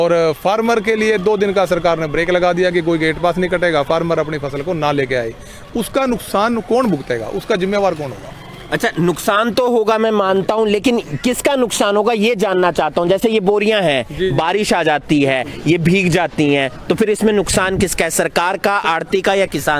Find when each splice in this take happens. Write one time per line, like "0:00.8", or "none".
none